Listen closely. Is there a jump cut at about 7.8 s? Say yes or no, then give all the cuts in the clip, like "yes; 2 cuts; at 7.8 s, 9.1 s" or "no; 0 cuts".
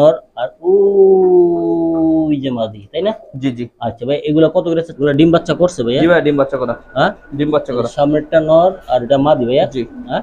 no; 1 cut; at 4.9 s